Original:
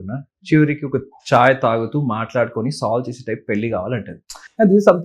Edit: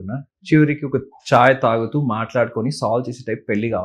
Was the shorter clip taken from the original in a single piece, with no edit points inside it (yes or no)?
yes